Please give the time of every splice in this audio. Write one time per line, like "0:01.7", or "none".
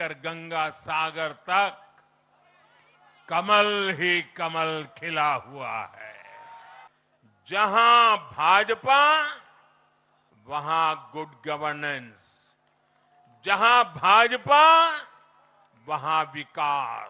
0:06.9